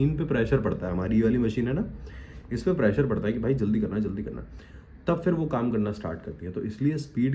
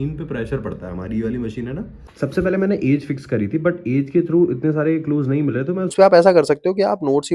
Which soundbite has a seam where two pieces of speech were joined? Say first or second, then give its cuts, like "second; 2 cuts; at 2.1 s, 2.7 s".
second; 2 cuts; at 2.0 s, 5.9 s